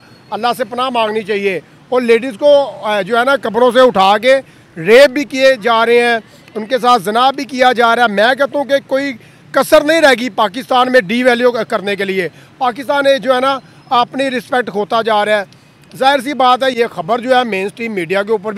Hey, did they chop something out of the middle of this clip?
no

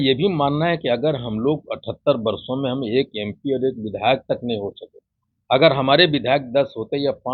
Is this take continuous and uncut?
yes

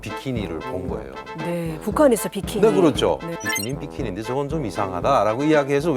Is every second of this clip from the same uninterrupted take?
yes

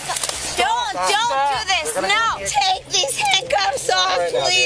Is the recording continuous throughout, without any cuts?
no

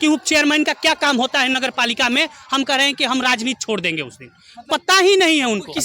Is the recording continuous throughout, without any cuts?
yes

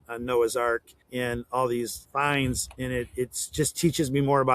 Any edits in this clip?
yes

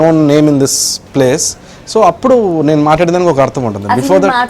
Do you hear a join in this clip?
no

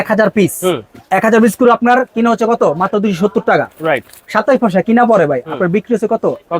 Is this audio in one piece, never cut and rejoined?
yes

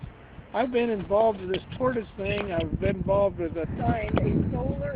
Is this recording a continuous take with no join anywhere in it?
yes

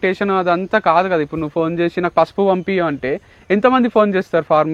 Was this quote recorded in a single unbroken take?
yes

